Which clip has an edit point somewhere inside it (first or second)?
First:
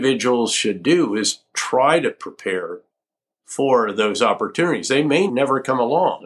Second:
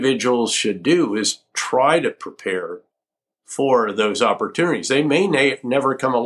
first